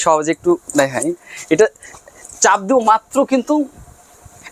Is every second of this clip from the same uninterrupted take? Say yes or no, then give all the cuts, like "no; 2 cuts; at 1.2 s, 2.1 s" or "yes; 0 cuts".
yes; 0 cuts